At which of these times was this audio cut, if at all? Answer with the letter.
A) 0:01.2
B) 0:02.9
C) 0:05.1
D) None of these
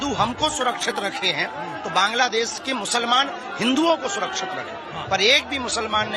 C